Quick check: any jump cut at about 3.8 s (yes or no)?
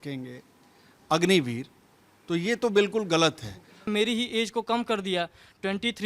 yes